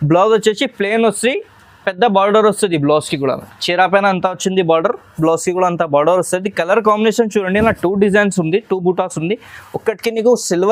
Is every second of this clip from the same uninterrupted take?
yes; 0 cuts

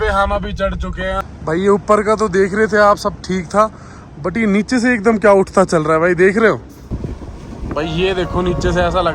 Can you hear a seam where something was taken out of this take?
yes; 2 cuts; at 1.2 s, 6.8 s

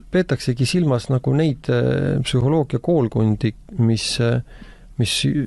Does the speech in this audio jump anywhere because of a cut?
no; 0 cuts

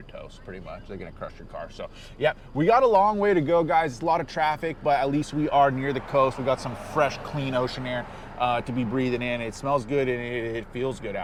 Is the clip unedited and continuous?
yes; 0 cuts

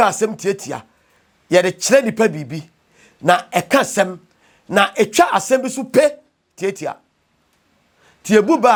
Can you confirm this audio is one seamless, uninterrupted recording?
yes; 0 cuts

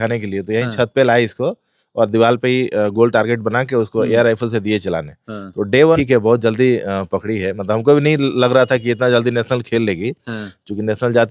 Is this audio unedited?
no; 1 cut; at 6.0 s

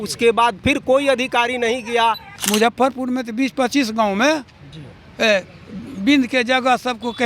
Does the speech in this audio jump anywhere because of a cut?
yes; 1 cut; at 2.3 s

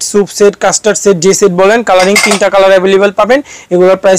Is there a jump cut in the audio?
no; 0 cuts

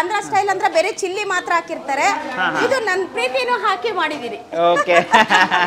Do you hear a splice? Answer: no; 0 cuts

